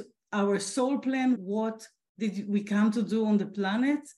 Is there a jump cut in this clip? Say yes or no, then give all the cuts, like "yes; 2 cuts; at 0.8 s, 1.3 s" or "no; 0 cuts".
yes; 1 cut; at 1.4 s